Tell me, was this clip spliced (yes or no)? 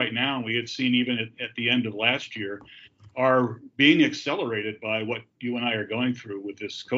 no